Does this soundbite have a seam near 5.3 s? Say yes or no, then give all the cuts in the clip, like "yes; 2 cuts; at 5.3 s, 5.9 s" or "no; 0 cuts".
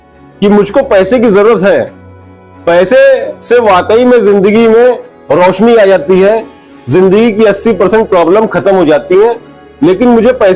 no; 0 cuts